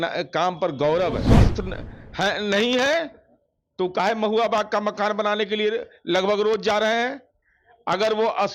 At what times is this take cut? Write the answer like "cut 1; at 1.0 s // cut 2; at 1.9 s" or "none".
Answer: cut 1; at 1.3 s